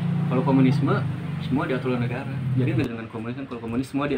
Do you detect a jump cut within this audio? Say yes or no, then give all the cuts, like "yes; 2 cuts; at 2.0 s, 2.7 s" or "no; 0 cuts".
yes; 1 cut; at 2.8 s